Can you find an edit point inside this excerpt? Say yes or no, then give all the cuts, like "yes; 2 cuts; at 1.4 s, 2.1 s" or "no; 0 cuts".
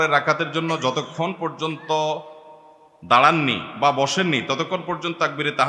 no; 0 cuts